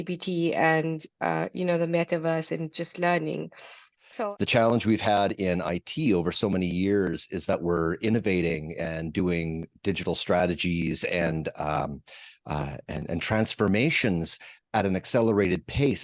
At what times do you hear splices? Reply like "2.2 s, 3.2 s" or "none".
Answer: 4.0 s